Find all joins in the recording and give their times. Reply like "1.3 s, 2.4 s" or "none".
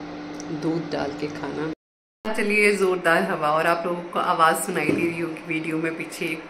1.7 s